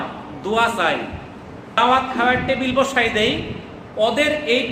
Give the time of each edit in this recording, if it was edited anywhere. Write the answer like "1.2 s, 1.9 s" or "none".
1.8 s